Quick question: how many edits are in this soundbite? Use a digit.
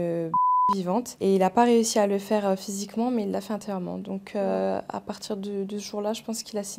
0